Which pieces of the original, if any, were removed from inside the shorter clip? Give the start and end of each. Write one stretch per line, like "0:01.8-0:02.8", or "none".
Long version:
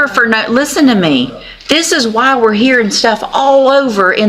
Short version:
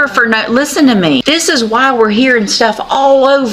0:01.2-0:01.7